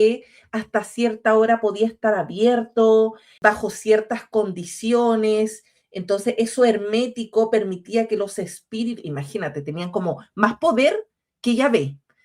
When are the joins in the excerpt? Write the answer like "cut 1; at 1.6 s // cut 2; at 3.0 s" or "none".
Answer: cut 1; at 3.2 s